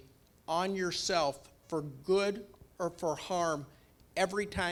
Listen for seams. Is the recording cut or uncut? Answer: uncut